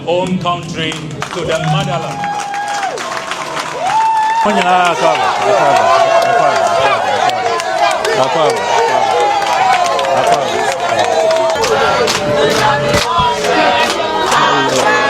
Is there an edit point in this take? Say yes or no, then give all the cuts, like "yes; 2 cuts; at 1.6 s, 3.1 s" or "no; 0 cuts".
no; 0 cuts